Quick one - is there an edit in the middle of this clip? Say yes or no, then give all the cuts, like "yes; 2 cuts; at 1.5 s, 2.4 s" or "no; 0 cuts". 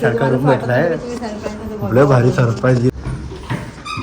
yes; 1 cut; at 2.9 s